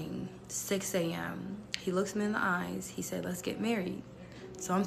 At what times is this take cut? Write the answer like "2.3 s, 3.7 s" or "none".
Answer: none